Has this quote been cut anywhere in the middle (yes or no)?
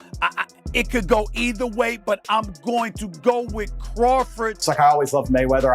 yes